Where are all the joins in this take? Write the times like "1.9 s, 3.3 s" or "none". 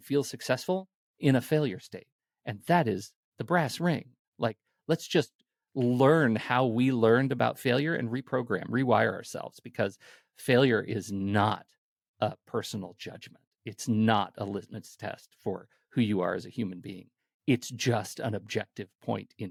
none